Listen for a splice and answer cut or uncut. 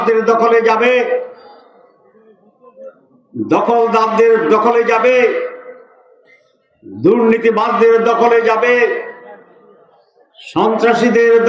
uncut